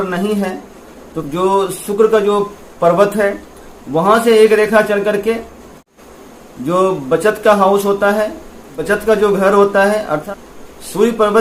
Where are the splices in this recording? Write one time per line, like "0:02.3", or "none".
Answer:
none

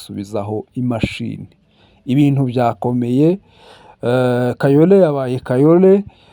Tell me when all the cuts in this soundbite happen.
none

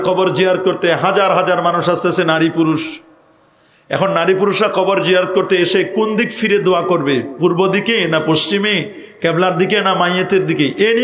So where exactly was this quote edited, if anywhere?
none

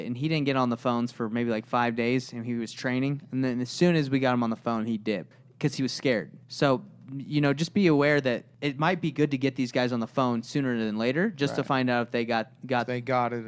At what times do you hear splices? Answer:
0:05.4
0:06.4
0:08.5

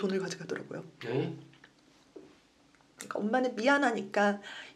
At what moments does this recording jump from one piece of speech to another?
none

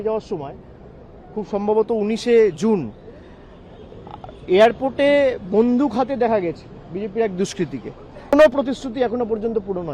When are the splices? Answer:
0:08.3

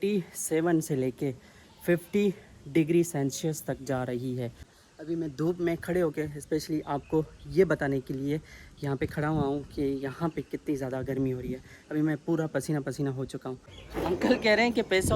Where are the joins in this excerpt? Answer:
0:04.6
0:13.6

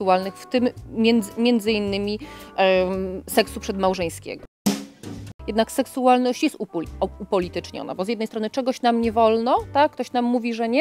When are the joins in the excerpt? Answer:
0:05.0

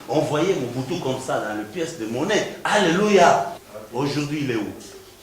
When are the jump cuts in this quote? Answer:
0:03.6

